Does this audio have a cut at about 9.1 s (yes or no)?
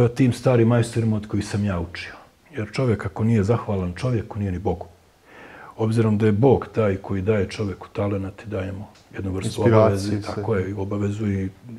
no